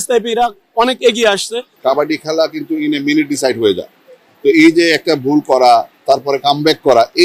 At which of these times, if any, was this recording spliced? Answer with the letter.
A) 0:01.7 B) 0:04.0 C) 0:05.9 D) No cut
A